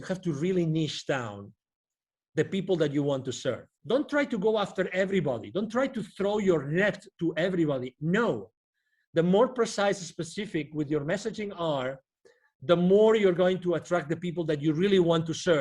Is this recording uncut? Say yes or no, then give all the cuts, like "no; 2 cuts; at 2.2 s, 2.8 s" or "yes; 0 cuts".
no; 1 cut; at 3.7 s